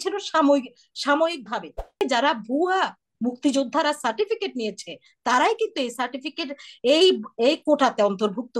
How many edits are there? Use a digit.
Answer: 1